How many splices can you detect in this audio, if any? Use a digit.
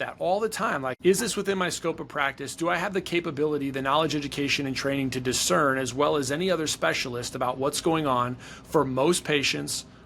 1